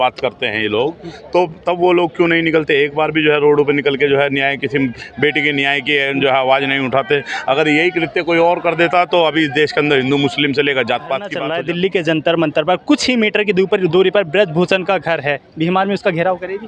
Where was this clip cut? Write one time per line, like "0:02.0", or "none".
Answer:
0:11.4

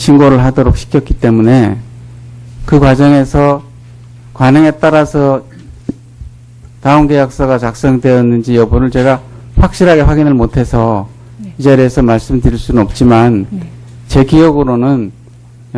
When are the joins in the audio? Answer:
0:09.4

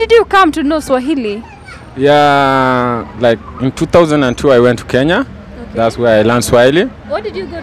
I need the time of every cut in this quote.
none

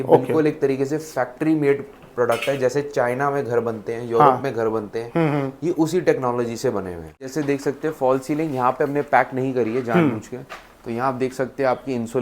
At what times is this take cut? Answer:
0:07.2

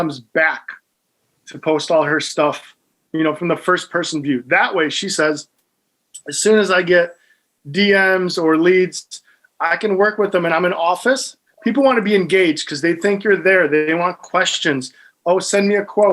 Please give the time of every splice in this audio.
0:11.4

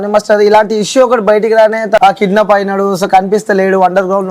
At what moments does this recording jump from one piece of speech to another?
0:02.0

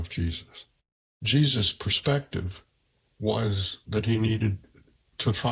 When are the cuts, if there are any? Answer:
0:01.2

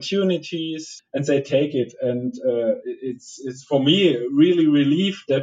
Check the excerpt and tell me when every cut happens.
0:00.9

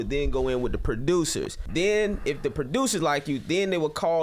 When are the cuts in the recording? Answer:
0:01.5

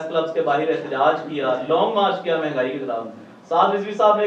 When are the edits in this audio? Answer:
none

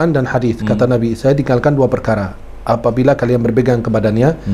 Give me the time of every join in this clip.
none

